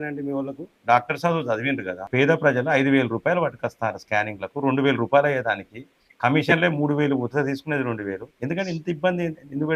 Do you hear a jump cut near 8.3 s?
yes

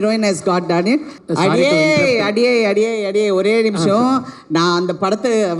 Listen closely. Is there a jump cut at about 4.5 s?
no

